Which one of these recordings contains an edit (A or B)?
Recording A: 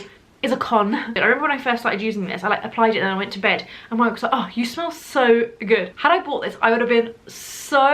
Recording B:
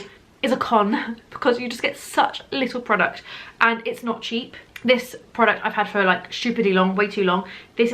A